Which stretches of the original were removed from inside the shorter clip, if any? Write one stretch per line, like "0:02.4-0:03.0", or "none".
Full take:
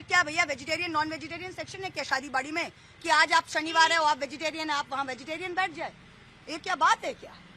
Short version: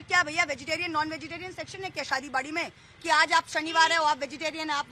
none

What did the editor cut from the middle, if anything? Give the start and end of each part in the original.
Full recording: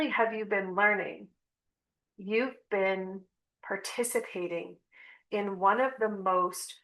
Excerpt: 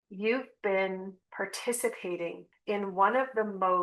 0:03.3-0:03.5
0:04.8-0:05.1

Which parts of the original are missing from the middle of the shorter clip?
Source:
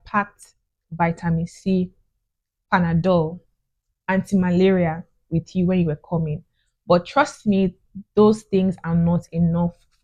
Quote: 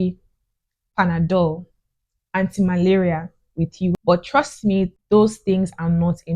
0:05.7-0:06.8
0:07.8-0:08.0

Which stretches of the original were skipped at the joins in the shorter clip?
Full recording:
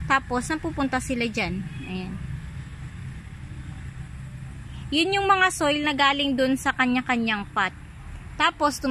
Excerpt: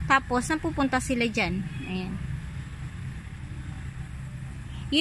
none

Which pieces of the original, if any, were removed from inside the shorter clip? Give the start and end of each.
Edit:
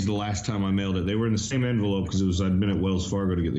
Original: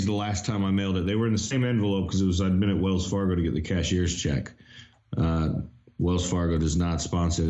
none

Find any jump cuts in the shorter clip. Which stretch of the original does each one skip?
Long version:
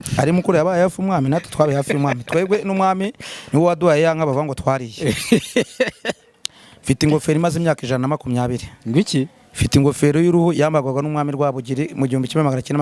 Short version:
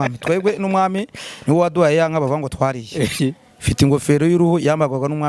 0:05.2-0:09.1

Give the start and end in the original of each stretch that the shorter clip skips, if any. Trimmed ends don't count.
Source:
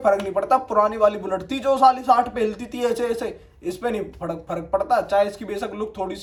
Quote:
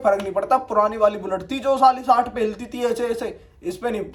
none

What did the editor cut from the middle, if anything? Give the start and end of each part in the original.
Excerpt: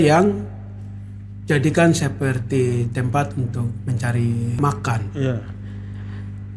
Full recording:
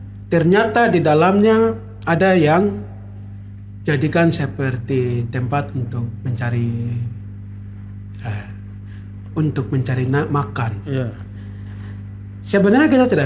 0:07.0-0:10.3

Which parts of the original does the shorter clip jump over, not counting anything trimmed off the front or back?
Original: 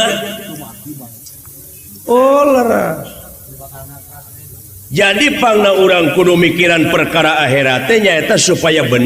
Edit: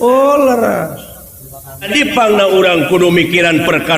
0:03.9-0:05.1

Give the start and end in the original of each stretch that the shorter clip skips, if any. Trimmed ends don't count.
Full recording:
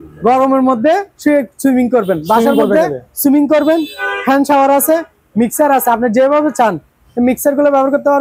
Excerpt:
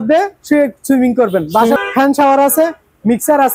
0:02.5-0:04.1

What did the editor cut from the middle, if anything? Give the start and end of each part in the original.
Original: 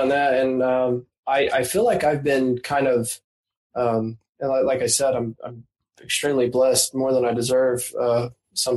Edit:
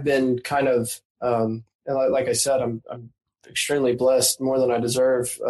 0:03.2-0:03.6

